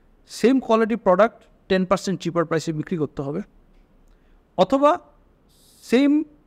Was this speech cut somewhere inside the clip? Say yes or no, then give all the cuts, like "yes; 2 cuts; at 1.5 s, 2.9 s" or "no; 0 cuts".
no; 0 cuts